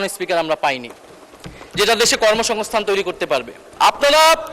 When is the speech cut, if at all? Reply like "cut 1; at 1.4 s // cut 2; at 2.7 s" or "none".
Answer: cut 1; at 3.6 s